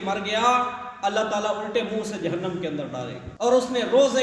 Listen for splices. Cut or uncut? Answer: cut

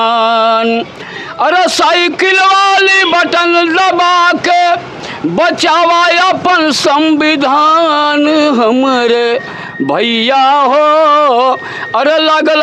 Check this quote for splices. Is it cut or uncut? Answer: uncut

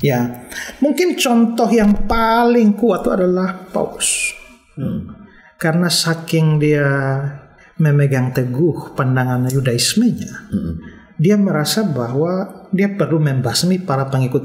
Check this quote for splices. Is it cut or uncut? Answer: uncut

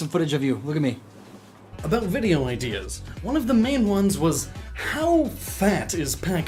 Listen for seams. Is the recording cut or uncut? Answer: uncut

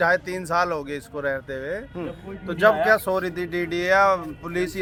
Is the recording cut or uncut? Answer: uncut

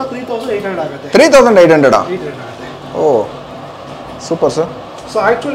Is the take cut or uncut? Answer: uncut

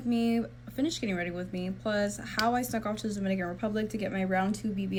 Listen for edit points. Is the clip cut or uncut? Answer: uncut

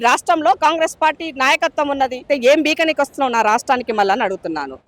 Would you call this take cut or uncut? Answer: cut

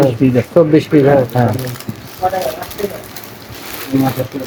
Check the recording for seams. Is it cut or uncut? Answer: uncut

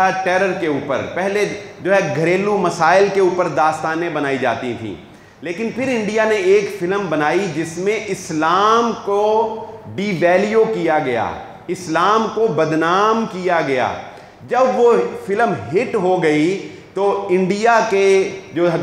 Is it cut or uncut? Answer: uncut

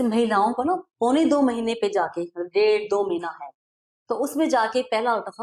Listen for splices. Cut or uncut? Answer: uncut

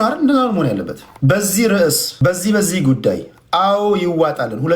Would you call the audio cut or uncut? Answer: cut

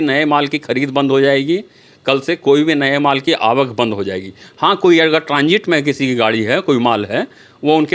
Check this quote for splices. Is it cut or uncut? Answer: uncut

